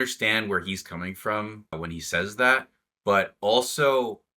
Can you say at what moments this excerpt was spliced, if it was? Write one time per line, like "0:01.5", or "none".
0:01.7

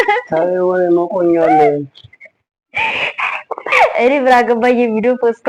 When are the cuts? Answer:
0:03.7

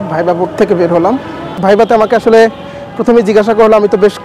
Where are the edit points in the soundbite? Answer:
0:01.5

